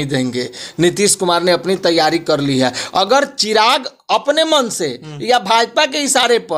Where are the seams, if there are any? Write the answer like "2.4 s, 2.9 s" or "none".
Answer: none

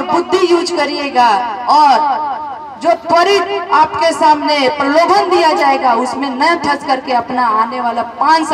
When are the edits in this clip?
none

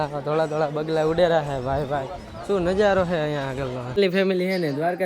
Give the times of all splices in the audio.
4.0 s

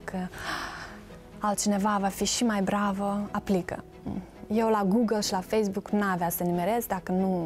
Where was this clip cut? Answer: none

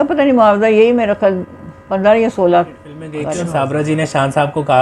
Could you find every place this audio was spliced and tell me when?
3.2 s

